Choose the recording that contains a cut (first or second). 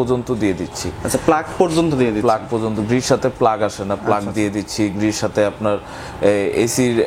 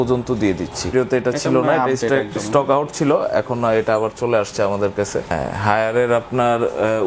second